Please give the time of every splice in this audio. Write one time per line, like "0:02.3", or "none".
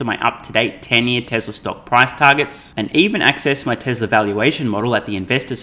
none